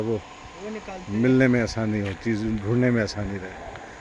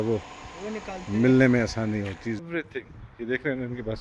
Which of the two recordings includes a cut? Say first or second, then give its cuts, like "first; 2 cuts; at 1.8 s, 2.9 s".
second; 1 cut; at 2.2 s